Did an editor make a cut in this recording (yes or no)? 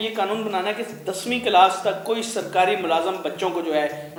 no